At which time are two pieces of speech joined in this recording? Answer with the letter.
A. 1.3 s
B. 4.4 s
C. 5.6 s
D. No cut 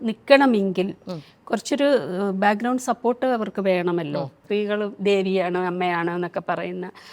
B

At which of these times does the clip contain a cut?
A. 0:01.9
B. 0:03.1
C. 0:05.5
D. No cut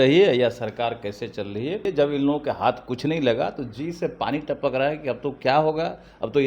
A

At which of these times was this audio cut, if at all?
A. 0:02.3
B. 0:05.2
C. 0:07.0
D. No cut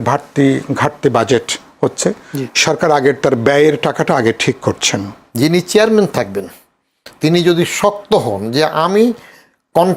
B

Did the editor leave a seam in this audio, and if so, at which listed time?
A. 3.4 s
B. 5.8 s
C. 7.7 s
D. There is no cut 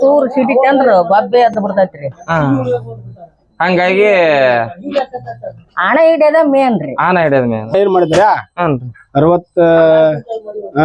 C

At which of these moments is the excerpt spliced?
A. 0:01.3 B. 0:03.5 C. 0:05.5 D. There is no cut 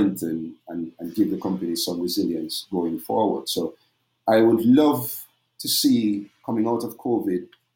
D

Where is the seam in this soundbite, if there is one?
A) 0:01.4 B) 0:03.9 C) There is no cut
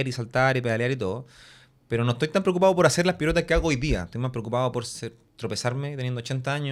C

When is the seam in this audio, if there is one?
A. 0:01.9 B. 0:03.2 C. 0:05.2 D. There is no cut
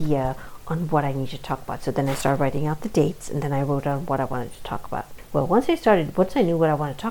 C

